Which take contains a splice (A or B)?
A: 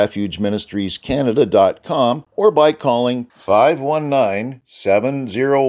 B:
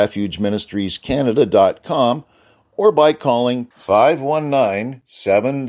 A